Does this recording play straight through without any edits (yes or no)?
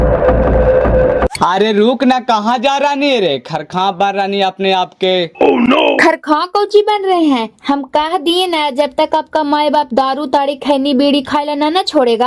no